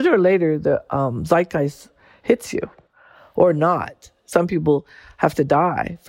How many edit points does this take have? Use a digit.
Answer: 1